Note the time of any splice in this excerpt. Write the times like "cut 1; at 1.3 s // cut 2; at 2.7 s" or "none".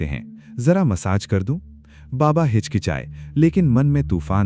none